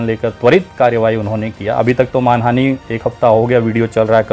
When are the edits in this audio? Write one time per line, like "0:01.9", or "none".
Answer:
none